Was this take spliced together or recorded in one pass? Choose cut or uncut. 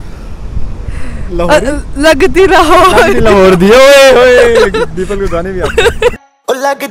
uncut